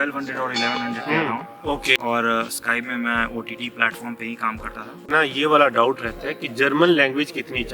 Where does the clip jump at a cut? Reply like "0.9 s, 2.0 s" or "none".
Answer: 2.0 s, 5.1 s